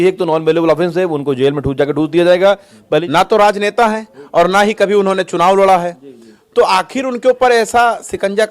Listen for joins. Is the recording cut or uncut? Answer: cut